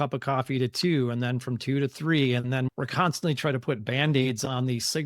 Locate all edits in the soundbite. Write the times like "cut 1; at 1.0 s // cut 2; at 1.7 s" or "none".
none